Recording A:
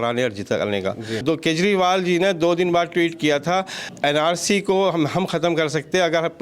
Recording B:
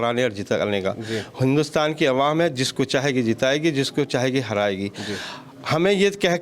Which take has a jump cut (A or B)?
A